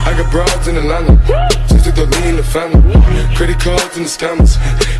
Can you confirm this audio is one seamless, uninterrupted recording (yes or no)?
yes